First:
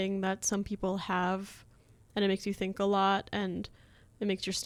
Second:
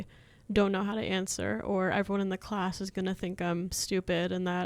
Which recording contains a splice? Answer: second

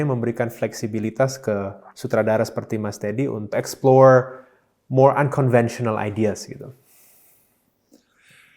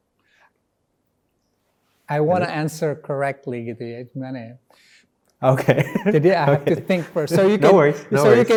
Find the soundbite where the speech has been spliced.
first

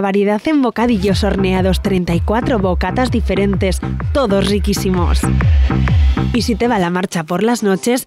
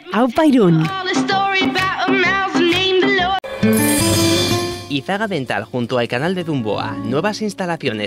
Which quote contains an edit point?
second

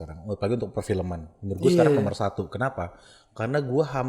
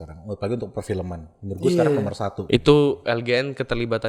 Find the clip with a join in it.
second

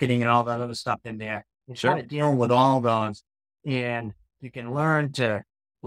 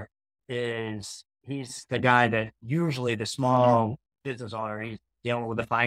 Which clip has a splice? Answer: first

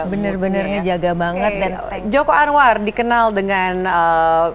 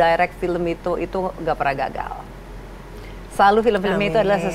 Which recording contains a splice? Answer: first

